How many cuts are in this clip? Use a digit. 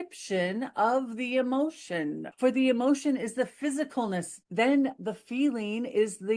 2